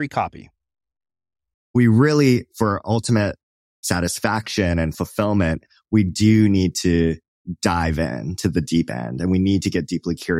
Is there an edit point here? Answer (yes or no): yes